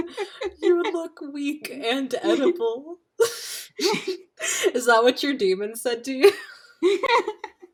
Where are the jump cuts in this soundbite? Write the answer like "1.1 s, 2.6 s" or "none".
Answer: none